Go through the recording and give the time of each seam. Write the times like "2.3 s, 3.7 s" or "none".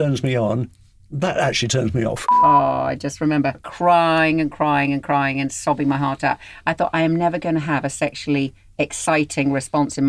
2.3 s, 3.7 s